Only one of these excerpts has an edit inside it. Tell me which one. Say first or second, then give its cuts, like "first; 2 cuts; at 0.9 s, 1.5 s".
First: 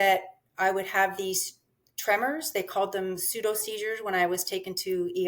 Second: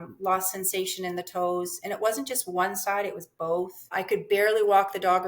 second; 1 cut; at 3.9 s